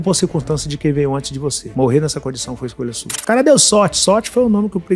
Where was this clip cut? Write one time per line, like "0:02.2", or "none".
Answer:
0:03.1